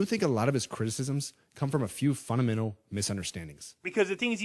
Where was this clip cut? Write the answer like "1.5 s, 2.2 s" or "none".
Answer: none